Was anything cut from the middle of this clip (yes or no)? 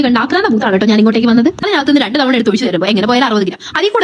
yes